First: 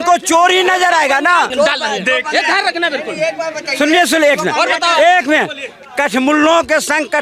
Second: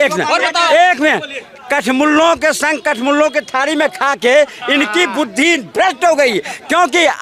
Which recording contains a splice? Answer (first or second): first